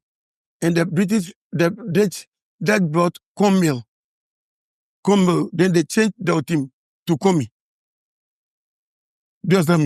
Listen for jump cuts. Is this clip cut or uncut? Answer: uncut